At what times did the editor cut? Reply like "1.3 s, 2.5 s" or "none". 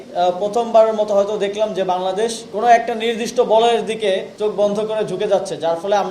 2.4 s, 4.3 s